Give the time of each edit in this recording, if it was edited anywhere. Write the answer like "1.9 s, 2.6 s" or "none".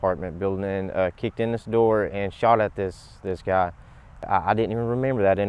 4.3 s